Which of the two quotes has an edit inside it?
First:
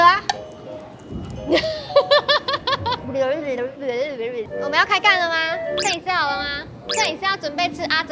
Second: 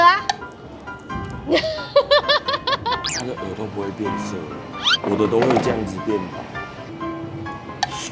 second; 1 cut; at 3.0 s

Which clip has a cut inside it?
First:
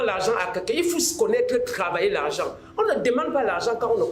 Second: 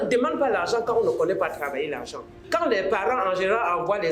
second; 1 cut; at 2.4 s

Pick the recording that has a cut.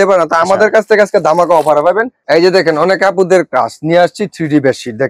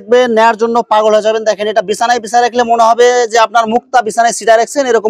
first; 1 cut; at 2.1 s

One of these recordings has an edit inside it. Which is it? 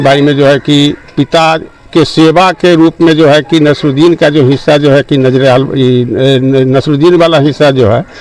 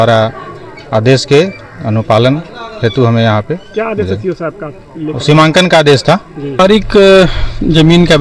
second; 1 cut; at 6.6 s

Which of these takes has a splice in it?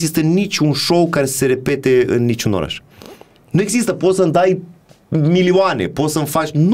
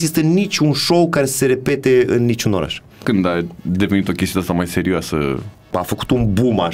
second; 2 cuts; at 3.0 s, 5.7 s

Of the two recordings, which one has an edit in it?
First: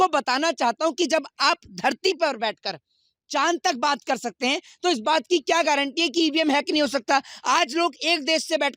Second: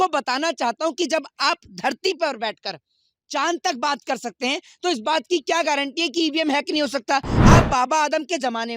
second; 1 cut; at 7.3 s

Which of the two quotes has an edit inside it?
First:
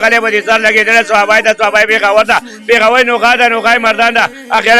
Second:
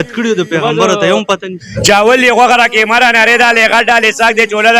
second; 1 cut; at 1.6 s

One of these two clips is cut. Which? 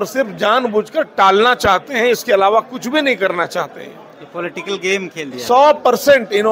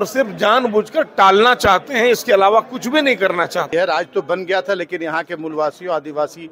second; 1 cut; at 3.7 s

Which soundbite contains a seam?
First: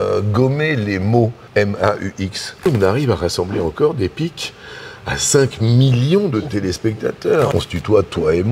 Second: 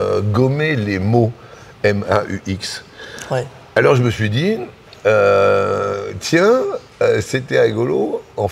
first; 3 cuts; at 1.4 s, 2.6 s, 7.5 s

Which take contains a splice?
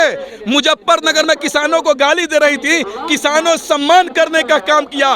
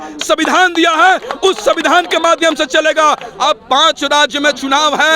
second; 1 cut; at 3.3 s

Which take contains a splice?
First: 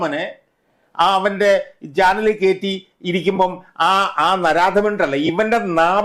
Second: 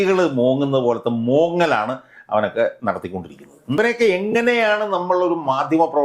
second; 1 cut; at 3.8 s

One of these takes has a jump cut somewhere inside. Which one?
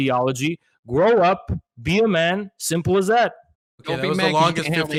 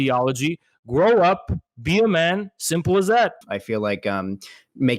second; 1 cut; at 3.5 s

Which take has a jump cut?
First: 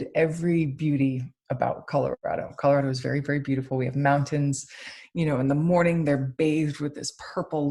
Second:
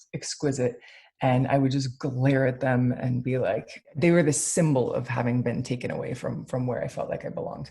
second; 1 cut; at 3.8 s

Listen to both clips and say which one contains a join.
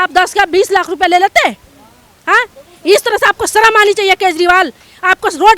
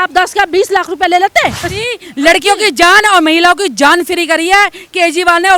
second; 1 cut; at 1.7 s

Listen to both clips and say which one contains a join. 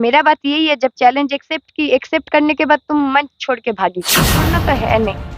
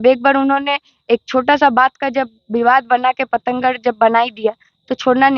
first; 1 cut; at 4.4 s

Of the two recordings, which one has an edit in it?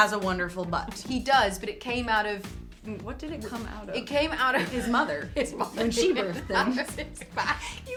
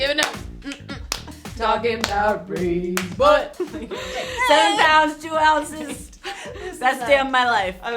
second; 1 cut; at 3.6 s

